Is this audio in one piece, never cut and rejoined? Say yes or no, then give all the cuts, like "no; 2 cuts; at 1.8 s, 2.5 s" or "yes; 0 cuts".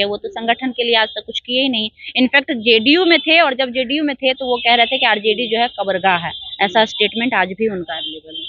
yes; 0 cuts